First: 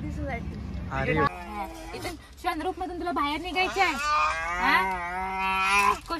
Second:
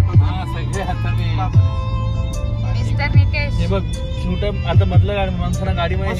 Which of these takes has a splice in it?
first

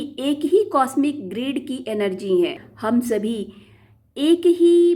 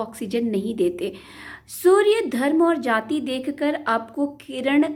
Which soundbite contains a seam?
first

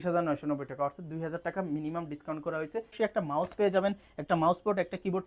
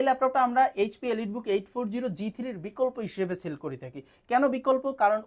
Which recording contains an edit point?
first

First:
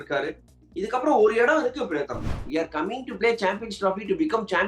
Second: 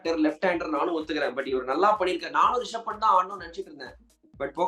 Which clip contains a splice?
first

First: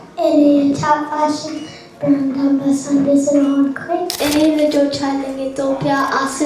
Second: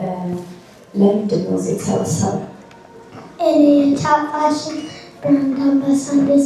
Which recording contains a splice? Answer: first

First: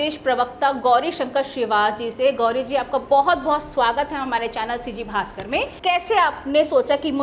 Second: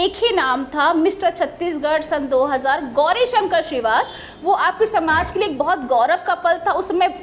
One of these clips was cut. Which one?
first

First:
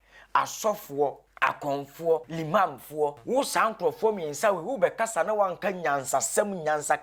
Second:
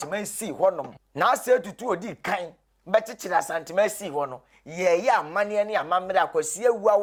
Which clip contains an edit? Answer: first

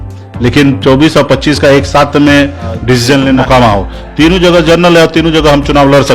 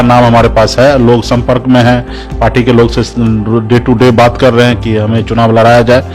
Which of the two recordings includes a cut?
first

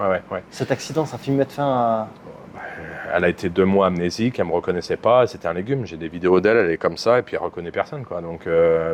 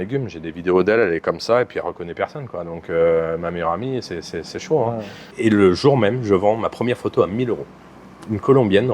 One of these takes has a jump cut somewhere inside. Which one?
second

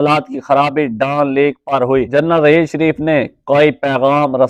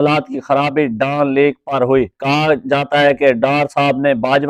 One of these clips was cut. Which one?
first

